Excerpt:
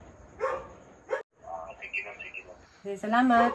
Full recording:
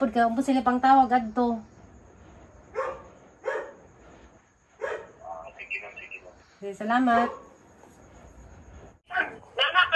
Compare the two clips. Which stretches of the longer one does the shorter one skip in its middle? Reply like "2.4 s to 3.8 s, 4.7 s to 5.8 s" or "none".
3.5 s to 5.0 s